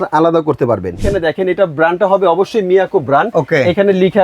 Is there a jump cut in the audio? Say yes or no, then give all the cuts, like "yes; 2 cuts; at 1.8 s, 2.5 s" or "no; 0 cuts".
yes; 2 cuts; at 1.0 s, 3.3 s